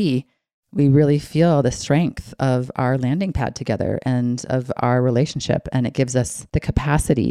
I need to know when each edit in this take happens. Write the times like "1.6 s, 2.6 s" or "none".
6.4 s